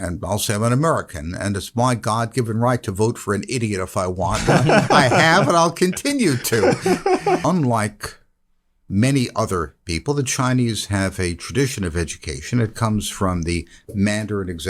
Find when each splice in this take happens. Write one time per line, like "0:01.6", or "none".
0:07.4